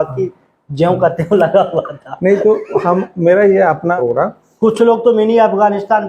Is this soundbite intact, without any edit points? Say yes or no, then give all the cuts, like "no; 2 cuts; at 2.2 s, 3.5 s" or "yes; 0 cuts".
no; 1 cut; at 3.9 s